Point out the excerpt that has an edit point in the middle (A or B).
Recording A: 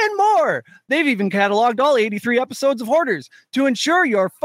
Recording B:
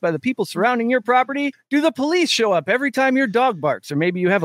B